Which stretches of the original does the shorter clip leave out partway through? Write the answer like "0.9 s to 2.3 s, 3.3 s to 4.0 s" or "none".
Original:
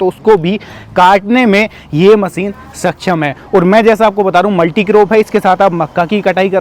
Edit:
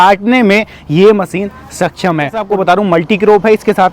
3.5 s to 4.1 s

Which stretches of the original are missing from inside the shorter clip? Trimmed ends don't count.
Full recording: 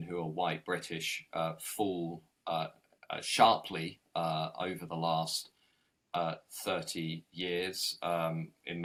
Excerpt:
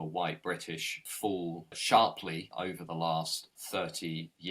1.4 s to 2.6 s, 4.0 s to 4.5 s, 5.6 s to 6.5 s

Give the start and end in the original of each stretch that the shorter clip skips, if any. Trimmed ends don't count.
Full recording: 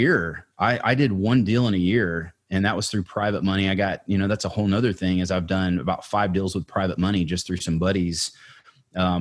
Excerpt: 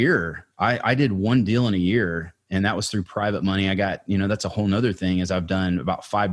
none

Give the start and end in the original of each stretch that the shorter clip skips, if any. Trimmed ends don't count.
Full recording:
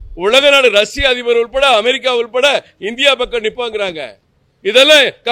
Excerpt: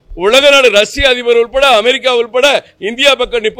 none

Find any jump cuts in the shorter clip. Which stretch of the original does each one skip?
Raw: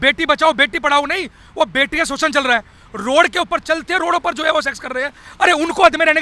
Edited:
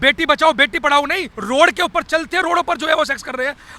1.3 s to 2.8 s

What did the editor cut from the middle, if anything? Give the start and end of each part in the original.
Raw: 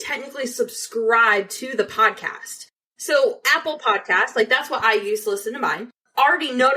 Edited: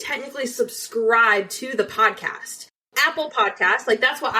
2.9 s to 3.4 s

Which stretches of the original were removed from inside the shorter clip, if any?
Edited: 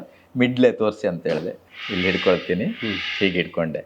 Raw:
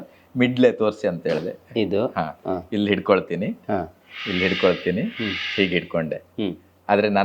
1.6 s to 4.0 s

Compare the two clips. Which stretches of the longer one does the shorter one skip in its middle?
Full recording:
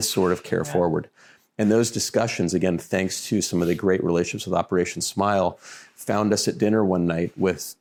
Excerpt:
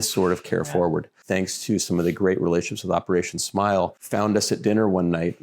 1.2 s to 2.8 s, 5.6 s to 6.0 s

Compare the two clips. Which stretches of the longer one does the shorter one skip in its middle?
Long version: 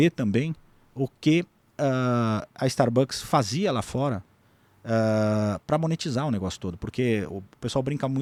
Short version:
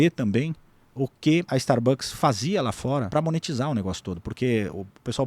1.5 s to 2.6 s, 4.2 s to 5.6 s

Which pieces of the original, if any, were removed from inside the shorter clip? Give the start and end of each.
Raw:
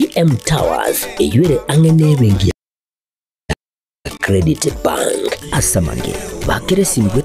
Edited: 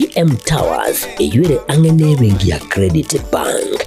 2.6 s to 4.2 s

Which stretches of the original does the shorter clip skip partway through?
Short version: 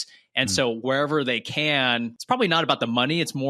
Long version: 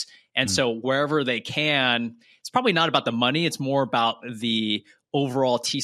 2.1 s to 2.4 s

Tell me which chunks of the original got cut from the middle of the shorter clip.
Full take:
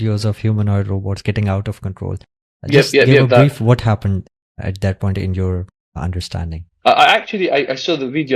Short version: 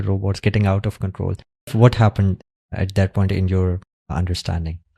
2.5 s to 3.6 s

